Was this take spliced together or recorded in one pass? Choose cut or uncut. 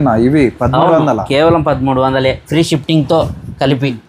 uncut